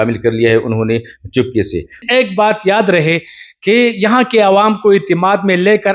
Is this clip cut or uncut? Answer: cut